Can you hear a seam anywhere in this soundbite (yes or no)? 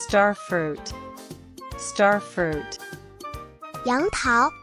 no